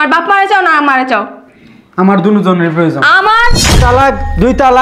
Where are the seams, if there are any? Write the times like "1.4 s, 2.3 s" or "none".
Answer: 3.7 s